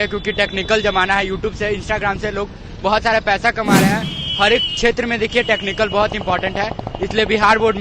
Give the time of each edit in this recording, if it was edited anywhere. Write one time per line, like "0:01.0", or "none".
none

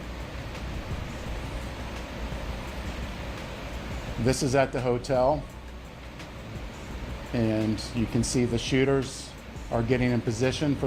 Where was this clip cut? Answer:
0:01.4

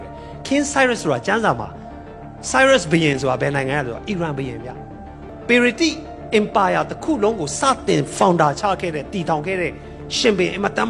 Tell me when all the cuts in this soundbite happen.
0:05.3

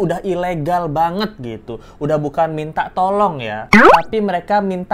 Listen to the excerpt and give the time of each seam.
none

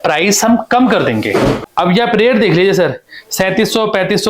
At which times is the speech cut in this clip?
0:01.7

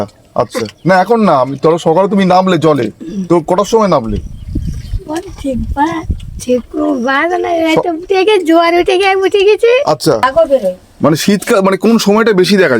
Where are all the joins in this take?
0:10.2

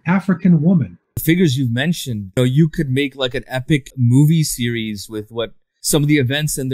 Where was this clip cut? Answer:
0:01.2
0:02.4
0:03.9
0:05.7

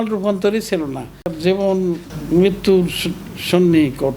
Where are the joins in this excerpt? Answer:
0:01.3

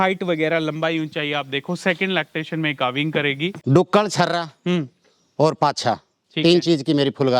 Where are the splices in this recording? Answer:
0:03.6

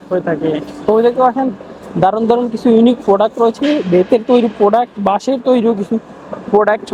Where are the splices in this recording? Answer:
none

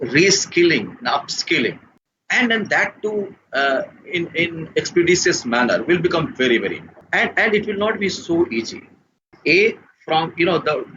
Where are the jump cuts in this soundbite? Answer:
0:01.8
0:07.0
0:09.3

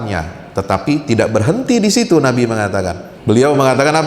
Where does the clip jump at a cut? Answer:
0:03.0

